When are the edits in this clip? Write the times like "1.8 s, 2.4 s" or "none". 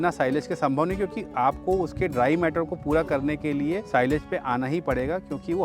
3.8 s